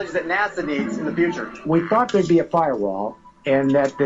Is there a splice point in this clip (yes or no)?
yes